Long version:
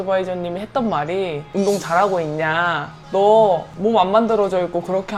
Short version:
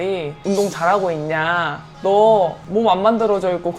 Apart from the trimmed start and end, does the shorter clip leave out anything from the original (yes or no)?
no